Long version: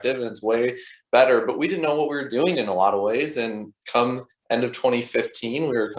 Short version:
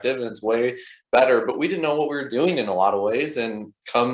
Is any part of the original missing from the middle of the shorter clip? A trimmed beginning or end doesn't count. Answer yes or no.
no